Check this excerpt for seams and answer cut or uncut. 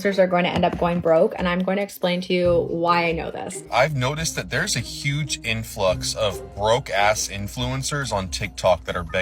cut